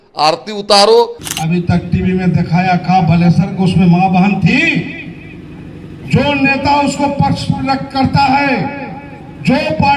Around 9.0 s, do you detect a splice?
no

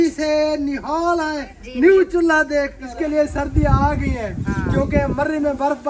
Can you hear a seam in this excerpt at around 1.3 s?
no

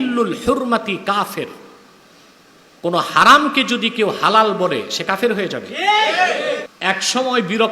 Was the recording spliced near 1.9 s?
no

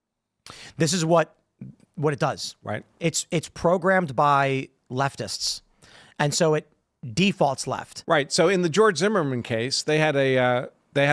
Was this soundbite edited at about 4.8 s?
no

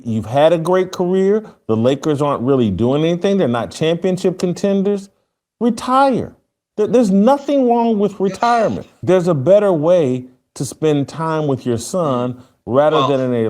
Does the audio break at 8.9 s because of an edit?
yes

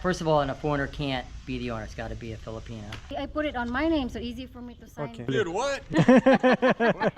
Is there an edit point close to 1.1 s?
no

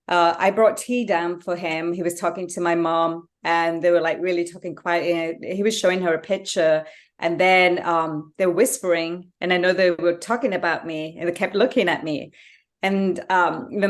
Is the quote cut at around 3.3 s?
no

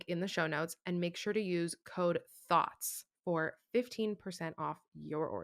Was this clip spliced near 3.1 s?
yes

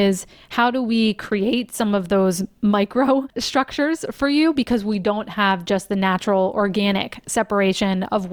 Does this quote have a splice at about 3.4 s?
yes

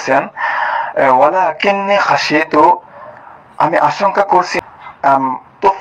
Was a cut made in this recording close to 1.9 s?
no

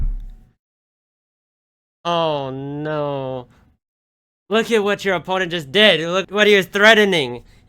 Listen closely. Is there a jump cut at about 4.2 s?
no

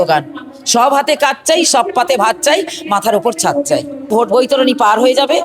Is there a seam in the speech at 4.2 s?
yes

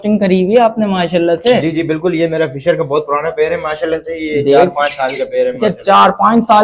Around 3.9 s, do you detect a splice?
no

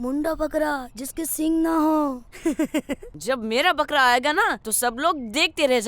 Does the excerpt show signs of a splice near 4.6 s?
yes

